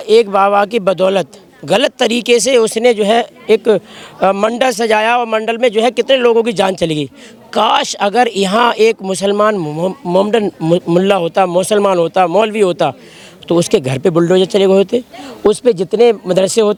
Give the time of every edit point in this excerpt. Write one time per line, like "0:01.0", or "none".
none